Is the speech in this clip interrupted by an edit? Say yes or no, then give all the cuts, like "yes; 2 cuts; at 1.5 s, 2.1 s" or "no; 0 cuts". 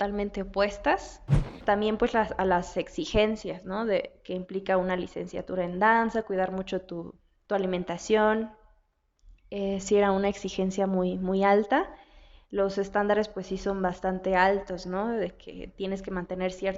yes; 1 cut; at 1.5 s